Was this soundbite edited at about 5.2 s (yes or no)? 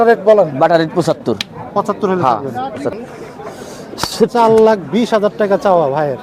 no